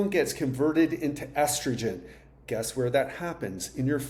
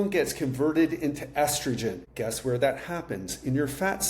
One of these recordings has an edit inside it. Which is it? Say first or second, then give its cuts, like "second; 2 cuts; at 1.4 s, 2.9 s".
second; 1 cut; at 2.1 s